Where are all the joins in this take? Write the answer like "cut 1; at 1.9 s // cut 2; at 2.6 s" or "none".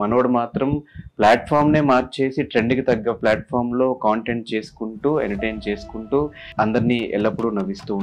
cut 1; at 6.4 s

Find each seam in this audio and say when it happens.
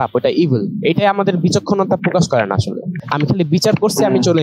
cut 1; at 2.9 s

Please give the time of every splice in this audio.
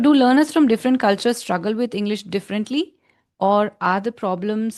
none

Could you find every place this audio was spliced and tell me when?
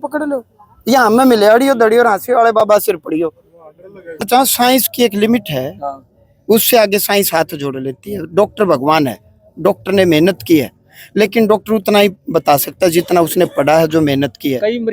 cut 1; at 4.2 s

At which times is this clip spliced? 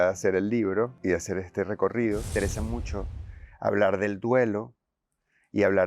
cut 1; at 1.0 s // cut 2; at 2.3 s

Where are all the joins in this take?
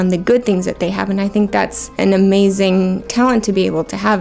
cut 1; at 1.8 s // cut 2; at 3.0 s

